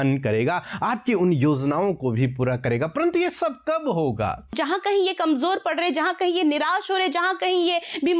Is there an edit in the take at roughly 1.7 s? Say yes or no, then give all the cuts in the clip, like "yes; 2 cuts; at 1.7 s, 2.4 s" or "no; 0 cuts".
no; 1 cut; at 4.6 s